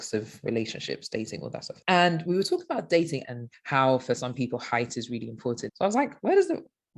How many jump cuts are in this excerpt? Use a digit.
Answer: 2